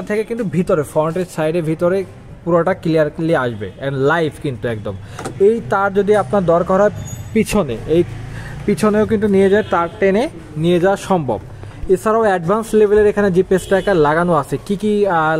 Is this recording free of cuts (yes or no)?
yes